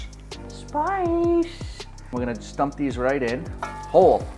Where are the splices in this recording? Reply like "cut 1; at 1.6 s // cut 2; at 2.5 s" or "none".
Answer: cut 1; at 2.0 s